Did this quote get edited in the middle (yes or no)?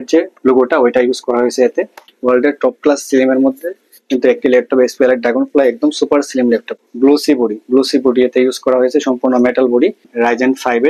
yes